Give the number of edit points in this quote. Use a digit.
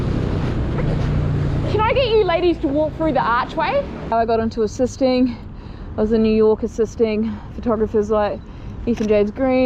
1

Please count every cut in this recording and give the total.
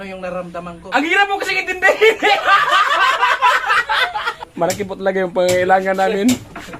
1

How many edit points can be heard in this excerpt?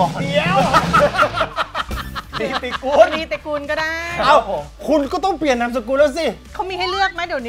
0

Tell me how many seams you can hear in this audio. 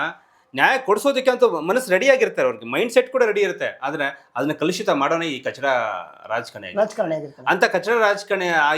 0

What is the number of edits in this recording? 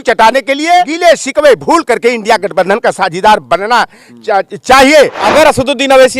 2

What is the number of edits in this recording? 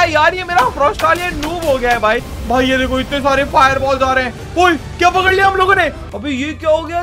2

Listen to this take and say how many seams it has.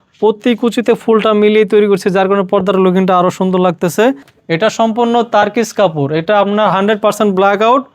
1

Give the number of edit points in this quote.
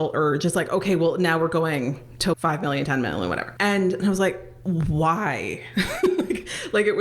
3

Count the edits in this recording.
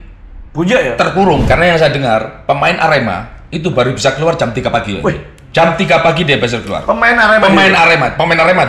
1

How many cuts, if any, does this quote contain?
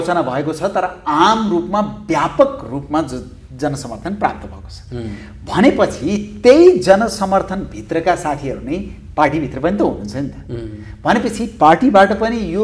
0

